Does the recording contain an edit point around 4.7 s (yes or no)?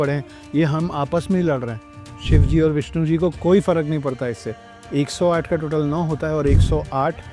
yes